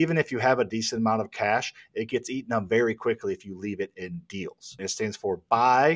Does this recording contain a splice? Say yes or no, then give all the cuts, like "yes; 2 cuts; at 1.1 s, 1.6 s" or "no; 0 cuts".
yes; 1 cut; at 4.7 s